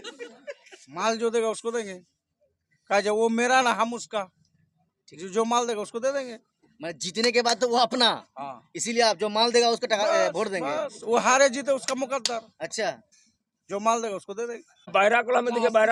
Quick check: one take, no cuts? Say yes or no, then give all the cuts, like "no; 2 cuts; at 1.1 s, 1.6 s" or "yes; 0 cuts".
no; 1 cut; at 14.9 s